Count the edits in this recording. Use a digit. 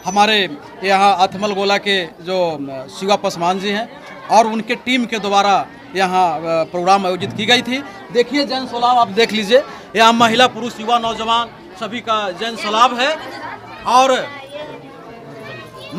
0